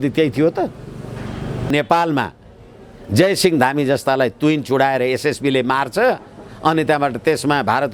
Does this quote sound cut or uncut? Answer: cut